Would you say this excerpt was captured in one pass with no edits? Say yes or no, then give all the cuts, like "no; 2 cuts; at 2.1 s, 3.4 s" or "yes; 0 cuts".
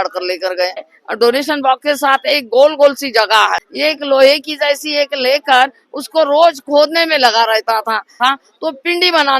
no; 3 cuts; at 0.9 s, 3.7 s, 8.2 s